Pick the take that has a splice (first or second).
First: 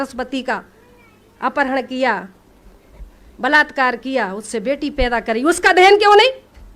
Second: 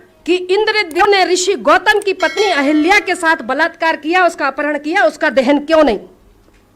second